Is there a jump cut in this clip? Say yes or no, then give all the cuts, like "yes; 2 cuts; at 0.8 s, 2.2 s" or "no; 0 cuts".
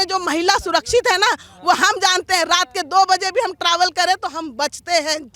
no; 0 cuts